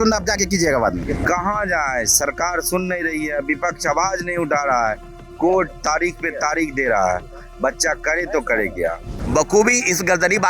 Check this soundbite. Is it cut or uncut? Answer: cut